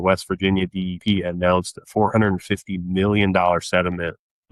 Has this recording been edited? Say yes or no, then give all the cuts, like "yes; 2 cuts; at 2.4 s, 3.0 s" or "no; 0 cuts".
no; 0 cuts